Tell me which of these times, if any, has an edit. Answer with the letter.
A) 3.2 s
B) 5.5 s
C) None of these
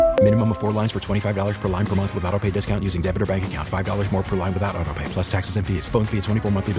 C